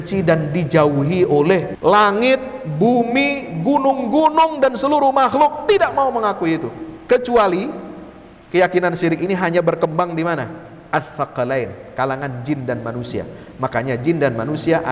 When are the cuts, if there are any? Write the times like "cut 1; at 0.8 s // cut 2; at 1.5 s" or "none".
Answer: cut 1; at 1.7 s